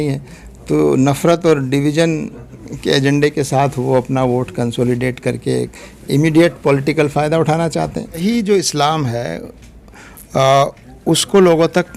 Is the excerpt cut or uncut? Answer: cut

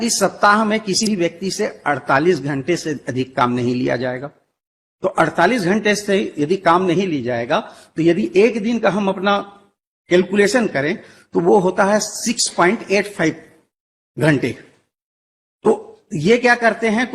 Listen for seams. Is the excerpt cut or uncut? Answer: cut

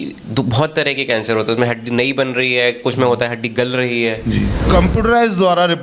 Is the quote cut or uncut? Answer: cut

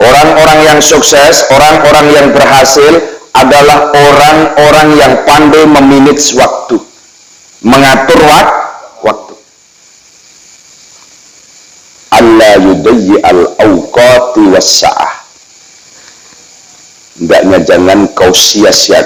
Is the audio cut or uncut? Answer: uncut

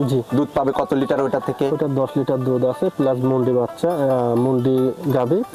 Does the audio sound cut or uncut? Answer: uncut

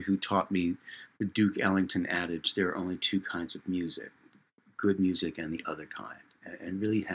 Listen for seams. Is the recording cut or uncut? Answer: uncut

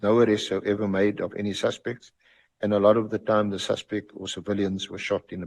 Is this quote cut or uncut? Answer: uncut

